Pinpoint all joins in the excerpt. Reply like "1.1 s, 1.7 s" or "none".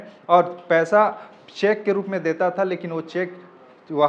none